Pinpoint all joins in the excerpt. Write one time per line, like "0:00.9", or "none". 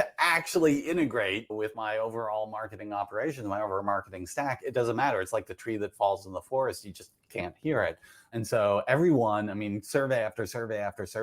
0:01.5